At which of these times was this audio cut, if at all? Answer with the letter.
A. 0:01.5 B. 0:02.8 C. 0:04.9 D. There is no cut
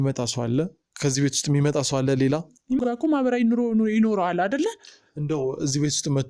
B